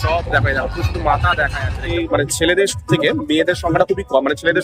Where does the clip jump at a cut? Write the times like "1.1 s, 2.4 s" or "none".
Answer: 1.9 s